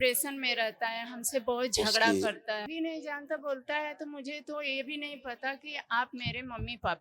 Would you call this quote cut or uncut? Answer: cut